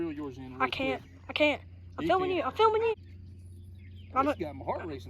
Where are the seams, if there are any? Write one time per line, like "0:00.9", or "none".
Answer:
0:02.9